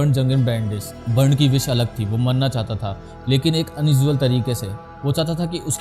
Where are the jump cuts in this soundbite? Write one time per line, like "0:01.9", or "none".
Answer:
0:01.0